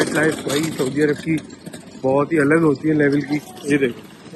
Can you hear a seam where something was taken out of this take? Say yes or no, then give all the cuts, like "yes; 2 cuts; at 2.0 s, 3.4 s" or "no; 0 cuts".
no; 0 cuts